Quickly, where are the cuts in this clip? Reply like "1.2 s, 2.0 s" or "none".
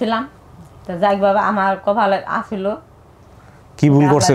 none